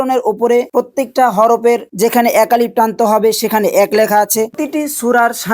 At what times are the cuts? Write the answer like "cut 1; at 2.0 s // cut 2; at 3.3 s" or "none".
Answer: cut 1; at 4.5 s